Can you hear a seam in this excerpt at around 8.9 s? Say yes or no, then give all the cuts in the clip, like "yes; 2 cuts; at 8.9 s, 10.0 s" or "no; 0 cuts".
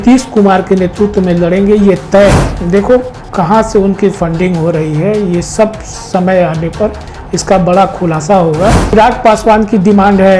yes; 2 cuts; at 2.5 s, 8.9 s